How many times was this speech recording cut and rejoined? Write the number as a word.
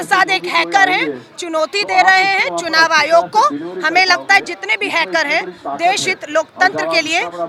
zero